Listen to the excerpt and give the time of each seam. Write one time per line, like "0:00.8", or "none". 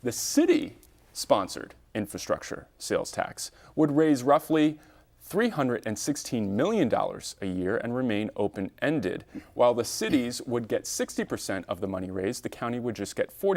none